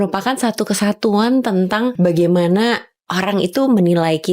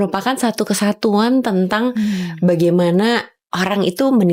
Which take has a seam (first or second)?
first